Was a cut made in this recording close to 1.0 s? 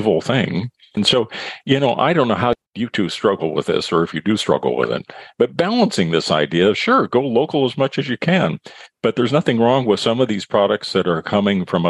yes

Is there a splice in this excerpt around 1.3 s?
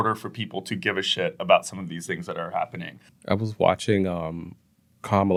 no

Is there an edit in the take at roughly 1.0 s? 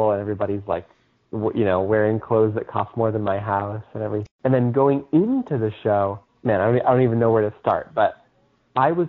no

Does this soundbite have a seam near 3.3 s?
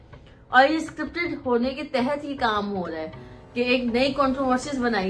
no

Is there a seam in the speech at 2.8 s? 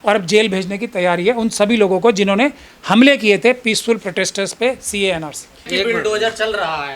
no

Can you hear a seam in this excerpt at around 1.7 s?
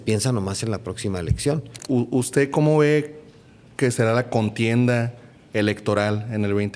yes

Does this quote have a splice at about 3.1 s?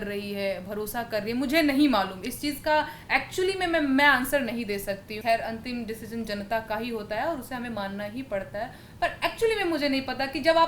no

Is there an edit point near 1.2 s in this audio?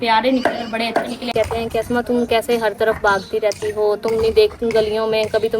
yes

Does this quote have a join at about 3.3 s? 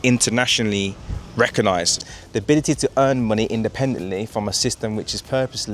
no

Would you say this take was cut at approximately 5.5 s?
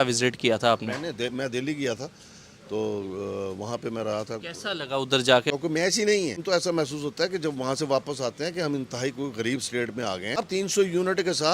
yes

